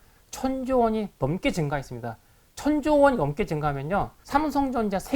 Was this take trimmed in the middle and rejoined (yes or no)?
yes